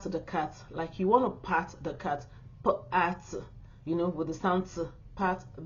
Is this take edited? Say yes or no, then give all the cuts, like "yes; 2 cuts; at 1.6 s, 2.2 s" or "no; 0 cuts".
no; 0 cuts